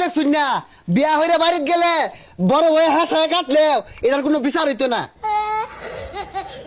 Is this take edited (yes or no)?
yes